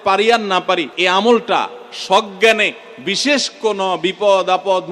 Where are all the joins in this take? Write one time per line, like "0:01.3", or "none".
0:00.9